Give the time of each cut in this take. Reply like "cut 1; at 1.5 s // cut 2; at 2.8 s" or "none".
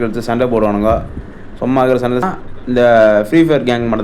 cut 1; at 2.5 s